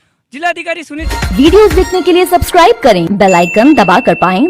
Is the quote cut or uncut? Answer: cut